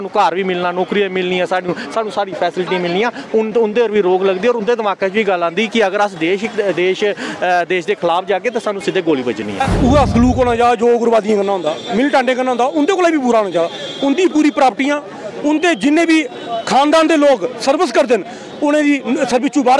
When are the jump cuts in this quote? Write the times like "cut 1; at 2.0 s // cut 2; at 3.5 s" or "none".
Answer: cut 1; at 9.6 s